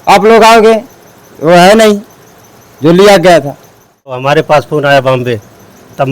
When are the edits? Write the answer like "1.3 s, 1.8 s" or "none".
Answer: 4.2 s